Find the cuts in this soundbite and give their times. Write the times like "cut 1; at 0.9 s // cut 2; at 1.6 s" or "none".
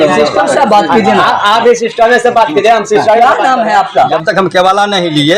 cut 1; at 4.1 s